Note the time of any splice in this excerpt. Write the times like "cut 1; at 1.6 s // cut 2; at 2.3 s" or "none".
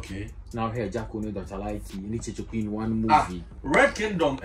none